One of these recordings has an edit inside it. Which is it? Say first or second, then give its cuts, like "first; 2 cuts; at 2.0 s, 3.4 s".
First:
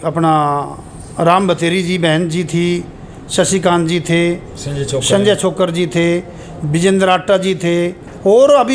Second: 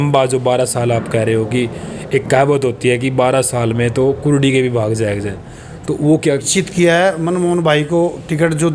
second; 1 cut; at 6.5 s